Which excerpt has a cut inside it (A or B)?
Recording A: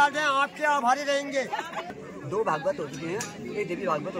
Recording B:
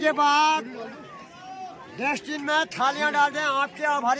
A